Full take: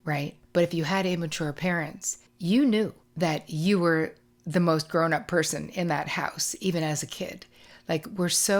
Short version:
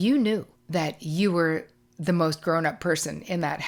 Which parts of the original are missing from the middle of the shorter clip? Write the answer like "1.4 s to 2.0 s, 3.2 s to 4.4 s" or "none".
none